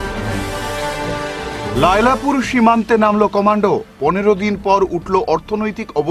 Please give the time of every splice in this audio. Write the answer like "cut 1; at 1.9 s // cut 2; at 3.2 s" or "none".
none